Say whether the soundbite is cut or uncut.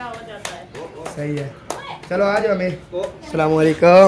cut